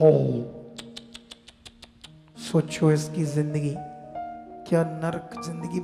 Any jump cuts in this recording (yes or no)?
no